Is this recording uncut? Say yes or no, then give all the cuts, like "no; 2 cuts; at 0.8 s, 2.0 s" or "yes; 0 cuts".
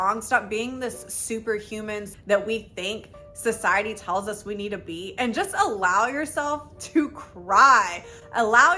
no; 1 cut; at 2.1 s